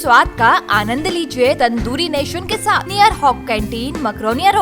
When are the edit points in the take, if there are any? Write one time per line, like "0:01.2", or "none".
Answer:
0:01.6
0:02.9